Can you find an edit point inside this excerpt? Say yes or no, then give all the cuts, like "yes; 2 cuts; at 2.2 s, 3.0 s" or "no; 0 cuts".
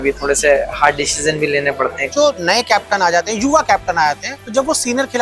yes; 2 cuts; at 2.1 s, 4.3 s